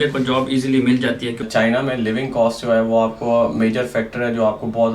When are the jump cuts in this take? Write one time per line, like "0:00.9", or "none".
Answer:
0:01.5